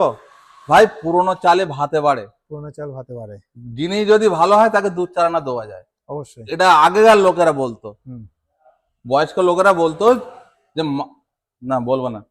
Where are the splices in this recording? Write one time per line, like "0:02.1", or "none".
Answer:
none